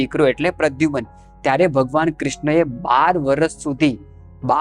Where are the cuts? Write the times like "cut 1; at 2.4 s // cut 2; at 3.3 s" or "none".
none